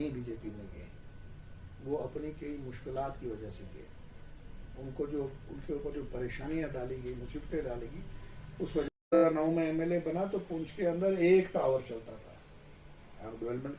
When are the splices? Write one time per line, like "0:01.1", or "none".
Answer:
0:09.2